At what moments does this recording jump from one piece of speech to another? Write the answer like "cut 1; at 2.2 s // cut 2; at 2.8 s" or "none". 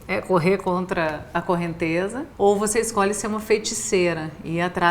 cut 1; at 2.2 s